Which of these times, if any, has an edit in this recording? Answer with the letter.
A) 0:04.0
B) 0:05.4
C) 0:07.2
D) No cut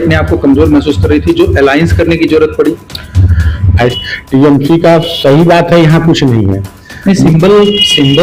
A